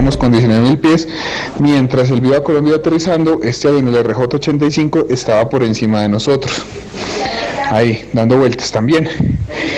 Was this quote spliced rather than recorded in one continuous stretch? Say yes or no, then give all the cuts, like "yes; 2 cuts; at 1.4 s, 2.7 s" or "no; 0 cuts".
no; 0 cuts